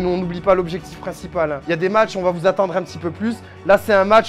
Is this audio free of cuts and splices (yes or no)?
yes